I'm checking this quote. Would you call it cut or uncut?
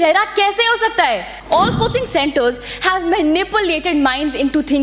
cut